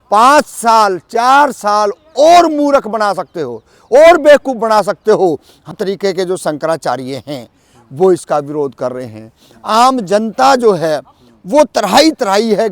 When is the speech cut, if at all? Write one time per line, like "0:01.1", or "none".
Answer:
0:05.7